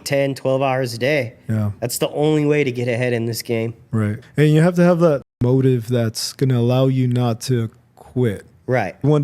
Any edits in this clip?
yes; 2 cuts; at 4.2 s, 5.3 s

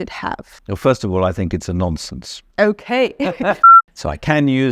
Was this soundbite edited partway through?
yes; 1 cut; at 3.6 s

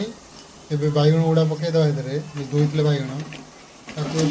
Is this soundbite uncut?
yes; 0 cuts

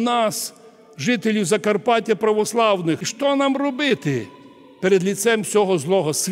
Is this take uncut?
no; 1 cut; at 3.1 s

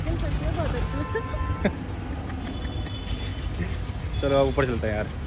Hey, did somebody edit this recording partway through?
no; 0 cuts

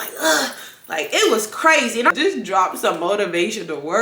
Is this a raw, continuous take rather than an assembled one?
no; 1 cut; at 2.2 s

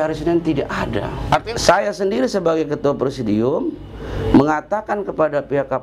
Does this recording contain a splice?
yes; 1 cut; at 1.5 s

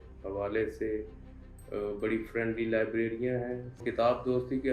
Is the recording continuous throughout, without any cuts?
no; 1 cut; at 3.8 s

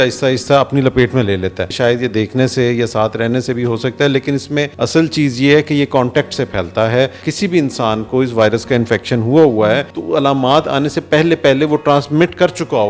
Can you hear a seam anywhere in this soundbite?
yes; 4 cuts; at 1.7 s, 4.7 s, 7.2 s, 9.9 s

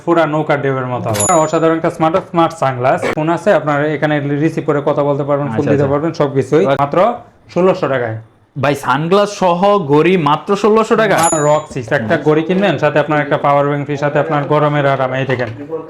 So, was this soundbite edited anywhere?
yes; 4 cuts; at 1.3 s, 3.2 s, 6.8 s, 11.3 s

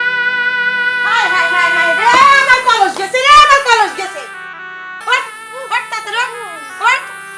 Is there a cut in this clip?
yes; 2 cuts; at 0.9 s, 4.9 s

